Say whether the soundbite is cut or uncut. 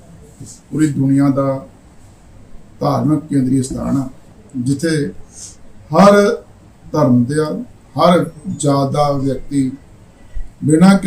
cut